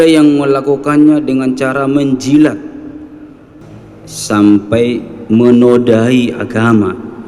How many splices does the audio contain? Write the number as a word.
one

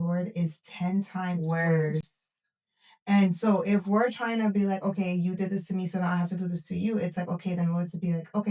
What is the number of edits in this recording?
zero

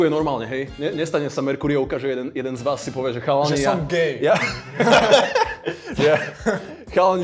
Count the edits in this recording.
zero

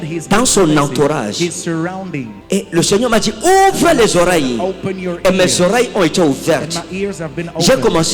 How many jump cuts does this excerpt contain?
one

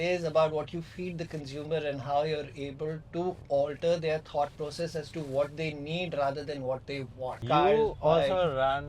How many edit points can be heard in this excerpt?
one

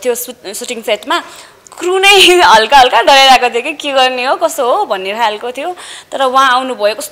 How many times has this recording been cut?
zero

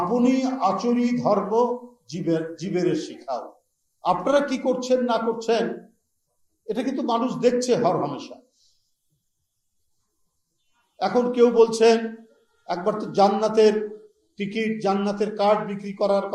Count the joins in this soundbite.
zero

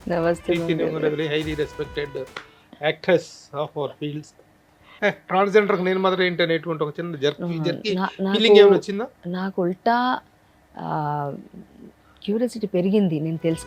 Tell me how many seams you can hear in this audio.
one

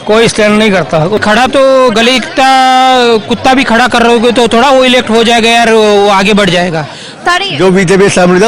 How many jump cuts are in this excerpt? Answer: two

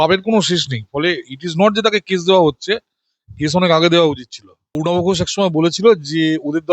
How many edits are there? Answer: one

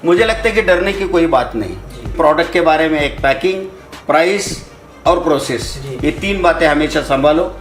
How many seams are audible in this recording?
one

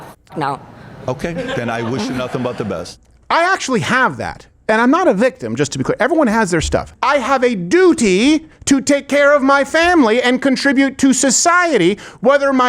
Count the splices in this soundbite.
two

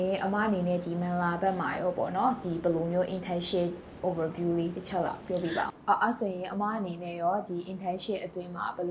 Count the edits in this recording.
one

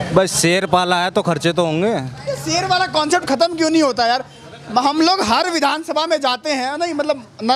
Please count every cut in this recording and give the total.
zero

